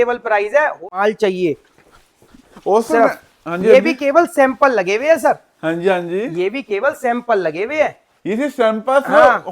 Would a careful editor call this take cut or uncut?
cut